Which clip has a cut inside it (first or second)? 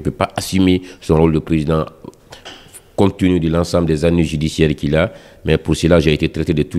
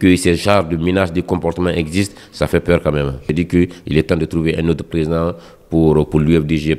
second